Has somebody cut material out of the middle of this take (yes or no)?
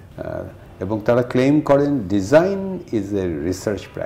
no